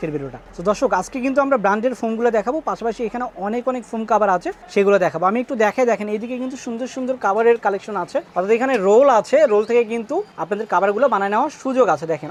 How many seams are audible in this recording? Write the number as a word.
zero